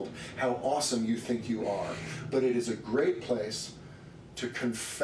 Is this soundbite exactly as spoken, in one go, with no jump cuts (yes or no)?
yes